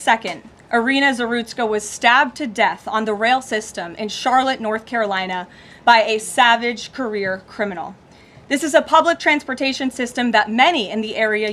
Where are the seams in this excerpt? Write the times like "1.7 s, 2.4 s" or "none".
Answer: none